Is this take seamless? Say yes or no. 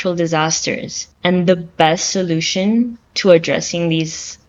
yes